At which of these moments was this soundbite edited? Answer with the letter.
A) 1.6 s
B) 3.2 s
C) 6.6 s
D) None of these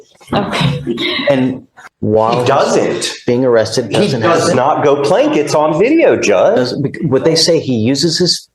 A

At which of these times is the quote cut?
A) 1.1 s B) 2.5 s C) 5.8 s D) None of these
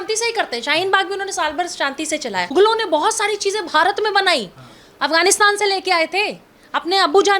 B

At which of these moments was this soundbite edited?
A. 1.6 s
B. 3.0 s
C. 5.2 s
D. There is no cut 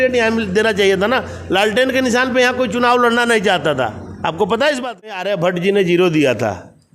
C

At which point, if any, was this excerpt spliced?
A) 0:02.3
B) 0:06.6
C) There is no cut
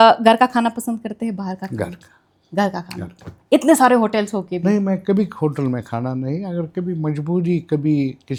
C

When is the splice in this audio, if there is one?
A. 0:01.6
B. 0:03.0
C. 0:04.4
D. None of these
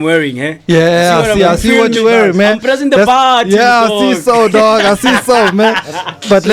D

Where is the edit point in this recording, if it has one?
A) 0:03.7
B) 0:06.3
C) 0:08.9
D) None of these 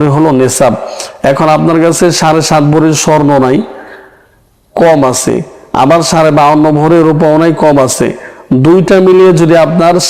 D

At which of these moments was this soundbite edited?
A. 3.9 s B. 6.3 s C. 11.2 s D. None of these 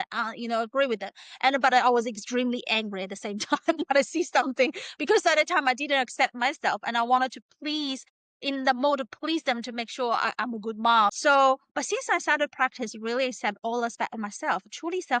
C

